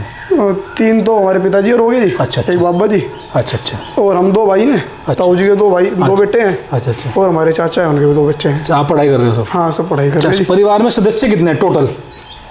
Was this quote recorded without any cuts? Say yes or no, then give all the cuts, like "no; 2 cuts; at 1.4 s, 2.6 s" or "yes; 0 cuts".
yes; 0 cuts